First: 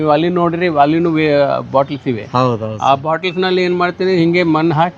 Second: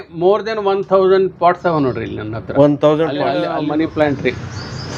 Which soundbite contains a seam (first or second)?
second